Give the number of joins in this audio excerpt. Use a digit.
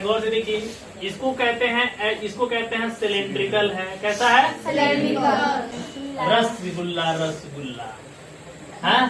1